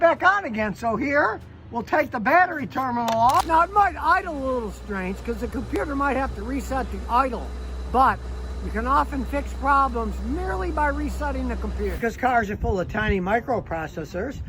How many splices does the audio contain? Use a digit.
2